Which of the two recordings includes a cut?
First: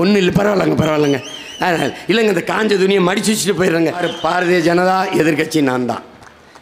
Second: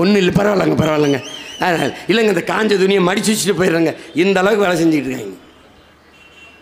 first; 1 cut; at 4.0 s

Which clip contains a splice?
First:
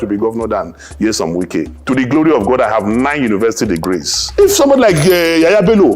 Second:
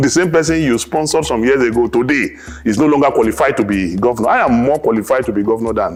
first; 2 cuts; at 1.8 s, 4.2 s

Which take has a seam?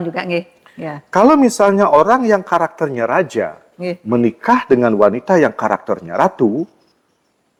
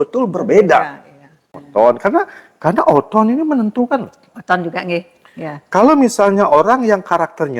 second; 1 cut; at 1.6 s

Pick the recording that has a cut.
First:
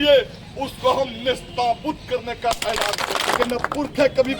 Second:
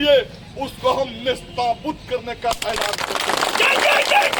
first; 1 cut; at 3.3 s

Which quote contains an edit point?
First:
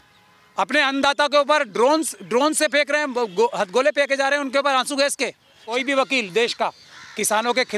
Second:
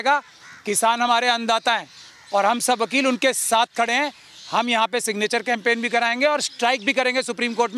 first; 1 cut; at 5.7 s

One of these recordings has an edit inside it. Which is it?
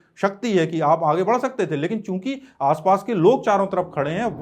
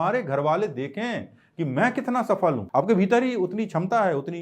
second; 1 cut; at 2.6 s

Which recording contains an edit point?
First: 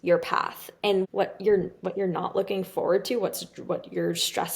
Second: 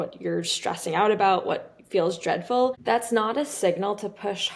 first; 1 cut; at 1.1 s

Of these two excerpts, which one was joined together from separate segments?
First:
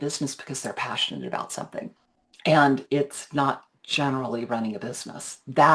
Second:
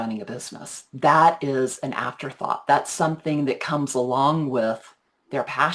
first; 1 cut; at 2.0 s

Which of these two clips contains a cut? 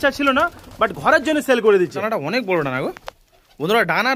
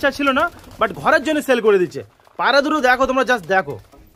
first; 1 cut; at 2.0 s

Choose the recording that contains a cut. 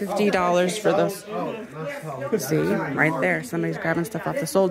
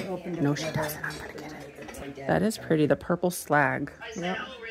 second; 1 cut; at 2.0 s

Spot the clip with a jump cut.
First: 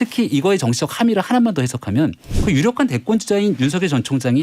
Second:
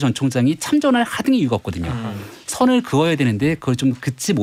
first; 1 cut; at 2.3 s

